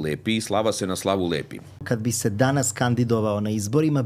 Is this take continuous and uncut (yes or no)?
no